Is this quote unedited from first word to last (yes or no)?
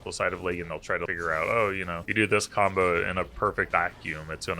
no